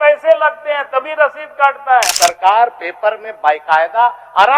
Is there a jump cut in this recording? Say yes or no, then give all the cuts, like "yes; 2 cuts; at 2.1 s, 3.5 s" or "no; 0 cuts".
yes; 1 cut; at 2.1 s